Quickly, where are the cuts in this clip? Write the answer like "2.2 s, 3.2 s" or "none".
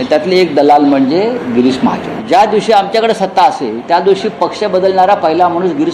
2.1 s